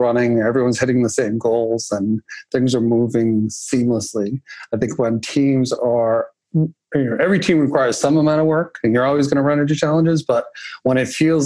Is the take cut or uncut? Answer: uncut